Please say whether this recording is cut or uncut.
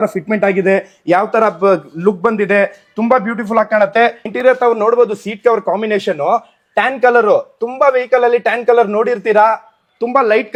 uncut